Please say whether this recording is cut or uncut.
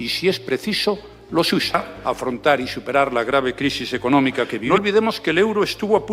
cut